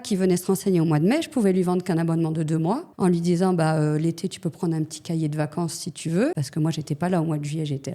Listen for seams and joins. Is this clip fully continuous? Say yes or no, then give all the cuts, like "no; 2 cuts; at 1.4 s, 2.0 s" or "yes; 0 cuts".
no; 2 cuts; at 2.9 s, 6.4 s